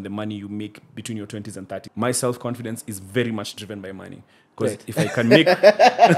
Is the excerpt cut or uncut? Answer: cut